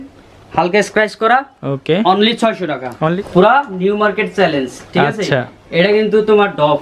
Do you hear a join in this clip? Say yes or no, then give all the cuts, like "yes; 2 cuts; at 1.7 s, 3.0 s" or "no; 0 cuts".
yes; 1 cut; at 3.1 s